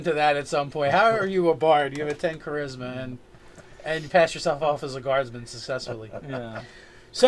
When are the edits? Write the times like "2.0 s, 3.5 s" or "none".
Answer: none

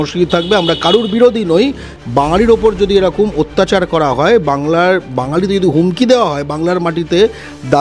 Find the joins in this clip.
1.9 s

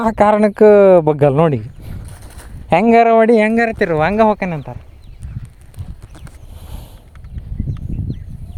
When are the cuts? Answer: none

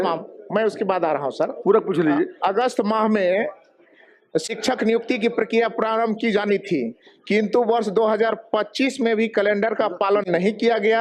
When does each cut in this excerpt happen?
1.6 s

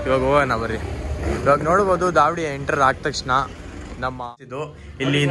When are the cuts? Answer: 4.2 s

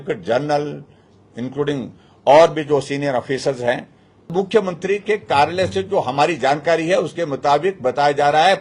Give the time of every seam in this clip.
4.3 s

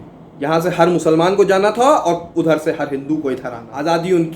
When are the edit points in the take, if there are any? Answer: 3.2 s

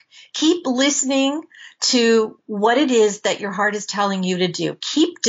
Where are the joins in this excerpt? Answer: 2.4 s

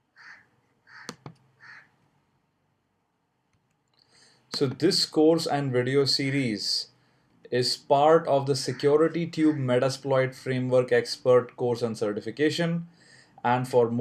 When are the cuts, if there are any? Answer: none

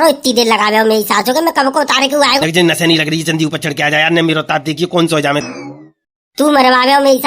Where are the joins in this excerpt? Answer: 2.4 s, 5.4 s

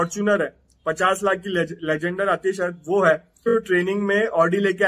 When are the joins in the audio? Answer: 3.5 s

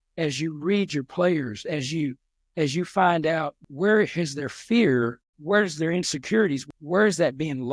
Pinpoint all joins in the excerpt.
3.6 s, 5.3 s, 6.6 s

